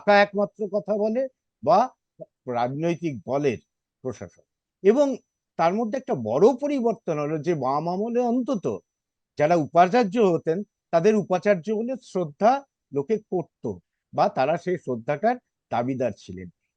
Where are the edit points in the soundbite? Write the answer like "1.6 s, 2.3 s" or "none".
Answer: none

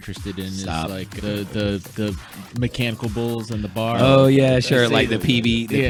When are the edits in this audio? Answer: none

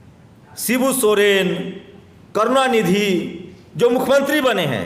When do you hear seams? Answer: none

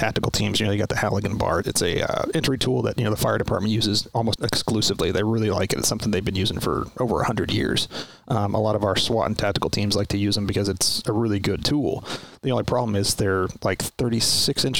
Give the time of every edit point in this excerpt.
1.7 s, 4.3 s

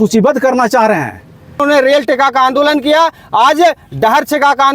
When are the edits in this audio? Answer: 1.6 s

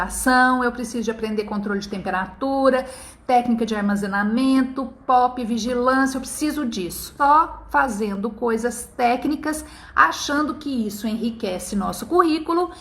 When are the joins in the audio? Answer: 7.0 s

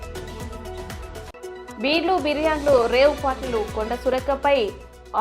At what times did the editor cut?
1.1 s

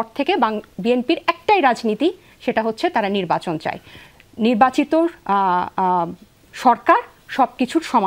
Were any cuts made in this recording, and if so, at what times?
none

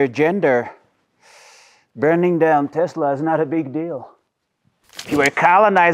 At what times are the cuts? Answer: 4.9 s

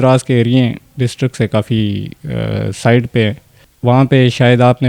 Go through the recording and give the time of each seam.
3.6 s

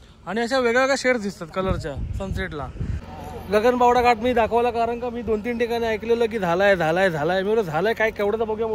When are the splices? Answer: 3.1 s

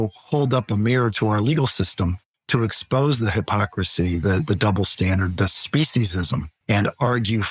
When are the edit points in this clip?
6.5 s

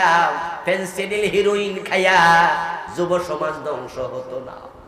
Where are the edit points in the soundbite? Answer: none

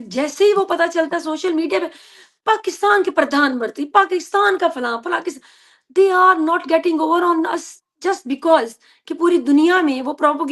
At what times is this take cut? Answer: none

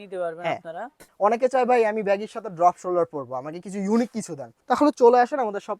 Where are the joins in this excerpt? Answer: 1.0 s, 4.5 s

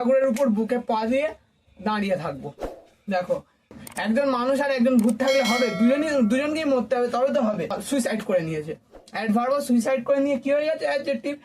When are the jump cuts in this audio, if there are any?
3.7 s, 7.8 s

